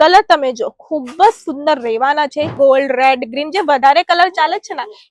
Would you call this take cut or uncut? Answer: cut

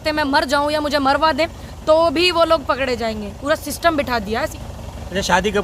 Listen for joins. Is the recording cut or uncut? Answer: cut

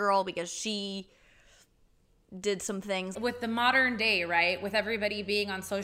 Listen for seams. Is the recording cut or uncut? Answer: cut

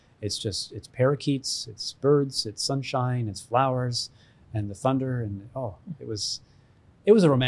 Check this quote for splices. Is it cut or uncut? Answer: uncut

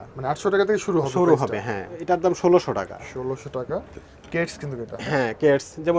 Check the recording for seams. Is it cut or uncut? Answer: uncut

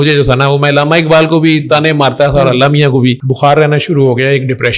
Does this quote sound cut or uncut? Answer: cut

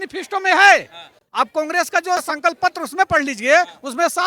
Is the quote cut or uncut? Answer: uncut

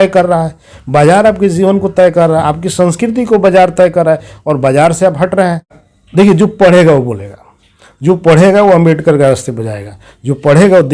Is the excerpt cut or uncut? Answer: cut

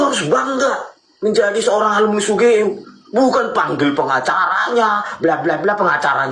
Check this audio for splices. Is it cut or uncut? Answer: uncut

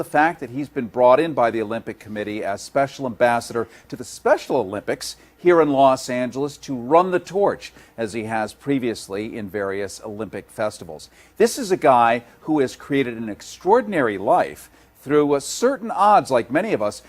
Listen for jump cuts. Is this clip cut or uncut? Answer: cut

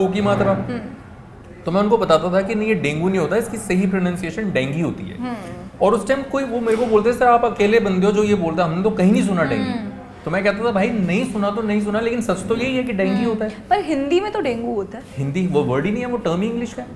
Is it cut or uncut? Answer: uncut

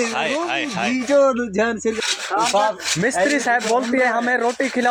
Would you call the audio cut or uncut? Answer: uncut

